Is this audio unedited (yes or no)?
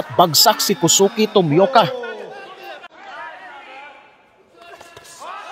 no